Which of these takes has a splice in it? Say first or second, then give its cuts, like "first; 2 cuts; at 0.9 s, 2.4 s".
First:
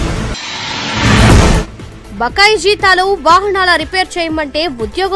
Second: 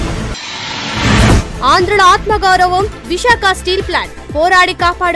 first; 1 cut; at 1.3 s